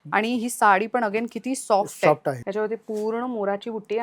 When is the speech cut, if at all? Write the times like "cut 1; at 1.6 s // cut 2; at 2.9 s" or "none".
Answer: cut 1; at 2.4 s